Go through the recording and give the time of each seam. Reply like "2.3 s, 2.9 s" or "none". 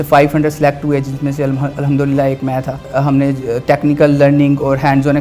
2.9 s